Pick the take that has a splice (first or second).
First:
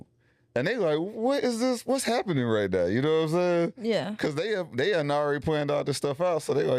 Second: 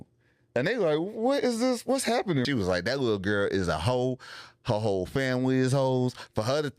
second